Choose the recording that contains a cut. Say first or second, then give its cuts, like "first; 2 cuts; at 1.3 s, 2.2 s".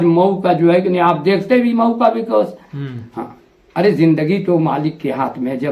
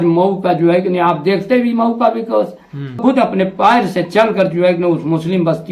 second; 1 cut; at 3.0 s